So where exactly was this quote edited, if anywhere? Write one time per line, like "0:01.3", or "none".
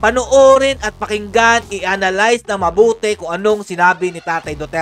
none